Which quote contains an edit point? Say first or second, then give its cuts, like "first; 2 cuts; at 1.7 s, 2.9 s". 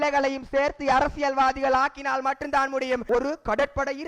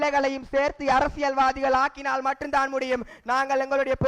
first; 1 cut; at 3.0 s